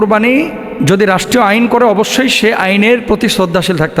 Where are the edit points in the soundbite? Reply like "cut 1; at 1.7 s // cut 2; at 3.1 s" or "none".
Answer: none

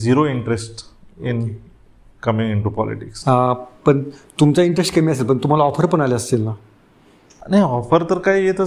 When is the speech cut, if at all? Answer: none

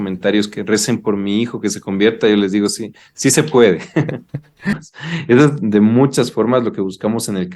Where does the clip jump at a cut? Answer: cut 1; at 4.7 s

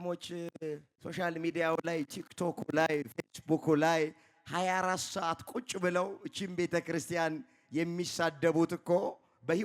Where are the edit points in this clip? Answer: cut 1; at 0.9 s

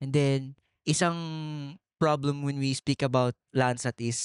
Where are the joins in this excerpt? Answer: none

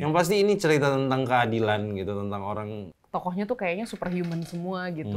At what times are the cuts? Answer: cut 1; at 2.9 s

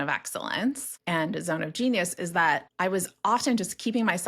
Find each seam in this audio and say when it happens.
cut 1; at 0.9 s // cut 2; at 2.7 s

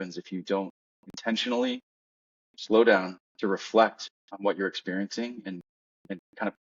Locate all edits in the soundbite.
none

